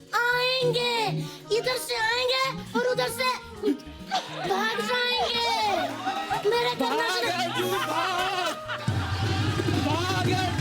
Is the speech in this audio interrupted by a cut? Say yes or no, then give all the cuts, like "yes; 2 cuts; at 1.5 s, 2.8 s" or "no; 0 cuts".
no; 0 cuts